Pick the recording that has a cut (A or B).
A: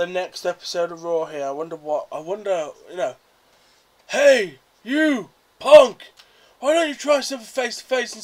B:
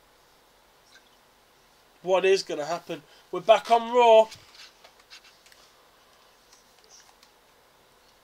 A